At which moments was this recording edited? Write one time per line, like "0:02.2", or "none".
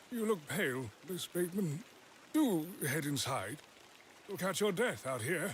none